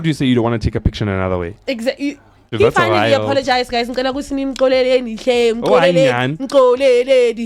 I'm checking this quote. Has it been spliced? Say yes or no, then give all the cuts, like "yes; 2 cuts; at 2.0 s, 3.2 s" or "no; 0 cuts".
yes; 1 cut; at 2.4 s